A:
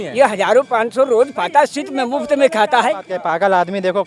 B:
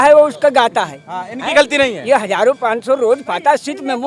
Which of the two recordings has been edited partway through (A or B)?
A